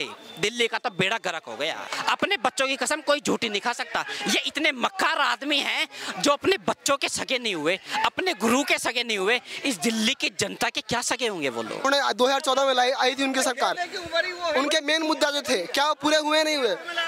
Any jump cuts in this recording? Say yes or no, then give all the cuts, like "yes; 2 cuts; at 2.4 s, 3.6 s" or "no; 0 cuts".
yes; 2 cuts; at 1.9 s, 11.9 s